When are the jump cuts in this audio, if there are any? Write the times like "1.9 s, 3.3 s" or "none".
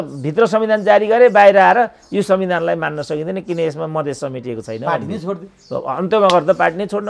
none